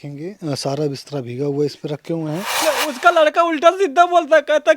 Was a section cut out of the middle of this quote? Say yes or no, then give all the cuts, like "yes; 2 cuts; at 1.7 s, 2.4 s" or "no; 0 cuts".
yes; 1 cut; at 2.6 s